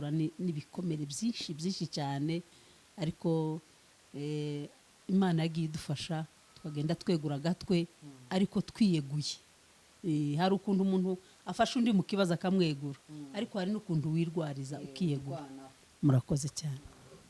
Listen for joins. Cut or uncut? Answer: uncut